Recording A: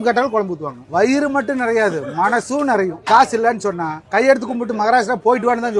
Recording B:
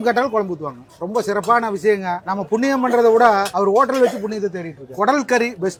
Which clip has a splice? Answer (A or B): A